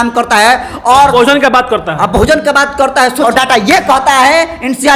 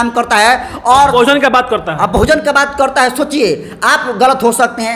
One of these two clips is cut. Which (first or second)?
first